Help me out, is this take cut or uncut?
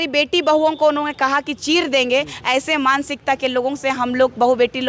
uncut